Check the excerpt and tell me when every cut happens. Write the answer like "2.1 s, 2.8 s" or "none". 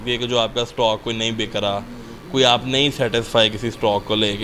none